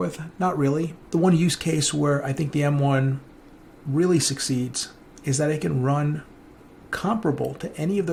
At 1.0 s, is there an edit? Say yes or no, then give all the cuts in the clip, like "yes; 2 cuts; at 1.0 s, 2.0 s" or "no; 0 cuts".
no; 0 cuts